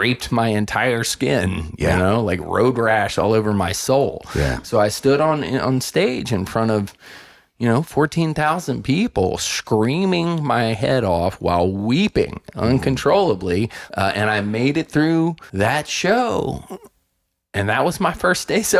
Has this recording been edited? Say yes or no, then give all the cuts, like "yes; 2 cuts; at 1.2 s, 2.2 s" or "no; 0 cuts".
yes; 2 cuts; at 13.8 s, 15.4 s